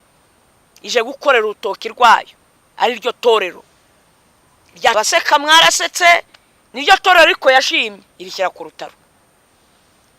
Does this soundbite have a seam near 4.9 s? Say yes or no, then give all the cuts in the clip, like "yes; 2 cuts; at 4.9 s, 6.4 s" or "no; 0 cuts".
yes; 1 cut; at 4.9 s